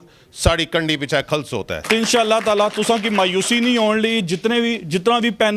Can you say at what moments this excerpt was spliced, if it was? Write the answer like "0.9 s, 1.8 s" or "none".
1.8 s